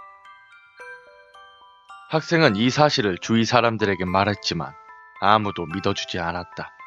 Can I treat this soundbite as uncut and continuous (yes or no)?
yes